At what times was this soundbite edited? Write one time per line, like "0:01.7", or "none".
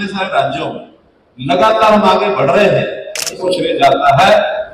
0:03.3